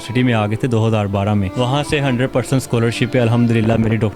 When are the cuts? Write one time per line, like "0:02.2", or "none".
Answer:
0:01.5